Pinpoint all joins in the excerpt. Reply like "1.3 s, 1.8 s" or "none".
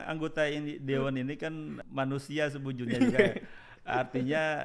1.8 s